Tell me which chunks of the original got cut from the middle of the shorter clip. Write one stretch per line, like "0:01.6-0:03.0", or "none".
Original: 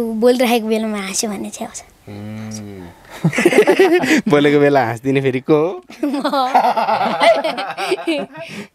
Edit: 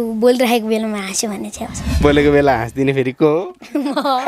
0:02.0-0:04.3